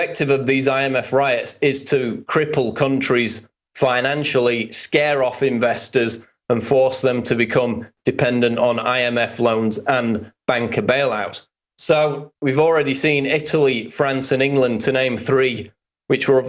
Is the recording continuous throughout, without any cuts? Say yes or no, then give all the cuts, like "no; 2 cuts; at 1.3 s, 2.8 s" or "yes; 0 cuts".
yes; 0 cuts